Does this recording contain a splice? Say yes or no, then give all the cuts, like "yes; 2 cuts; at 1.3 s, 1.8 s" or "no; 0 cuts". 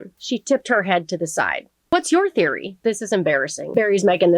yes; 2 cuts; at 1.7 s, 2.7 s